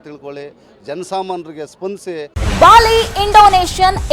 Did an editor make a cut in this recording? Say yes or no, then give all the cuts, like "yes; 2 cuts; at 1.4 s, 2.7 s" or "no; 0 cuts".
yes; 1 cut; at 2.4 s